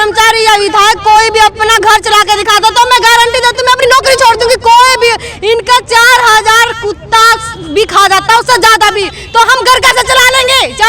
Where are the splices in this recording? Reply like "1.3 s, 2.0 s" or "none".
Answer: 3.8 s